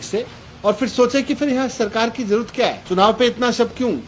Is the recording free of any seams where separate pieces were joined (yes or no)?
no